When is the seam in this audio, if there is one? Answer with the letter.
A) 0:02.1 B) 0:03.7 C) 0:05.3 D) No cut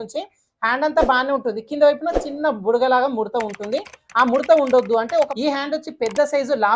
C